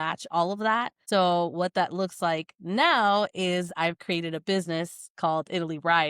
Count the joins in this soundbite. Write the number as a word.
one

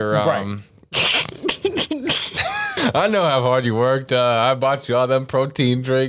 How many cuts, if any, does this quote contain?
one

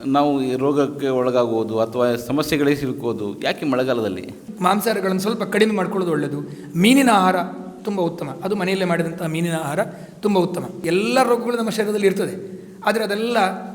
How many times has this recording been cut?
two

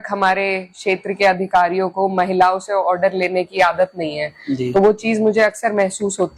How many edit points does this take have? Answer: zero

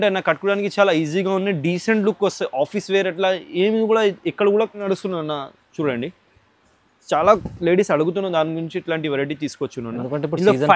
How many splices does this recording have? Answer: one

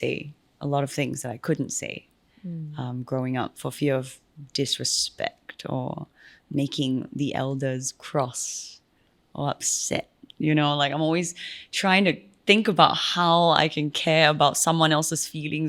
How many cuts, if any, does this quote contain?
zero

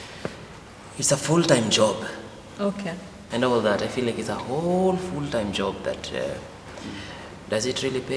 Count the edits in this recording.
one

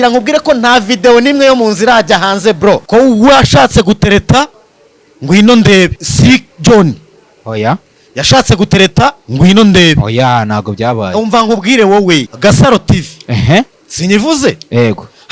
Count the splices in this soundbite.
three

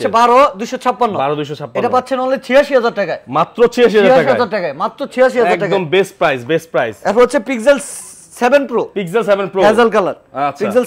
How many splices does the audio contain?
zero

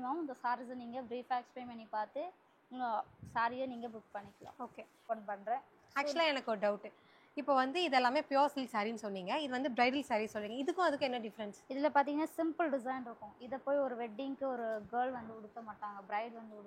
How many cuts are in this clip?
one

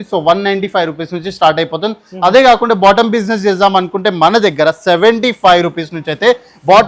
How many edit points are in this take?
zero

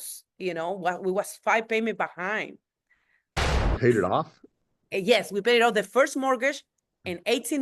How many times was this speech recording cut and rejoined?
one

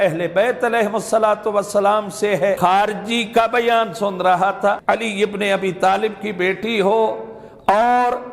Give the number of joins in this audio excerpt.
two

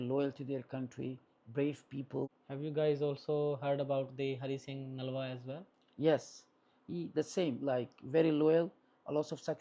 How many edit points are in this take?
one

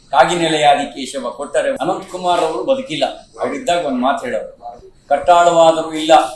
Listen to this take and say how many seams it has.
one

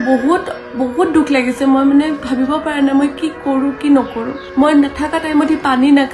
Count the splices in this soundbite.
one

